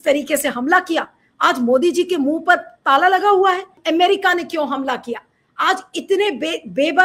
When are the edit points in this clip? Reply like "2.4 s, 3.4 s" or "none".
none